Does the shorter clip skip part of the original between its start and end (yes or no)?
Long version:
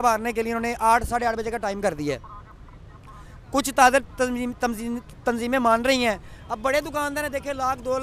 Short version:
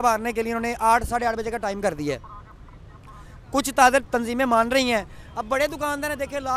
yes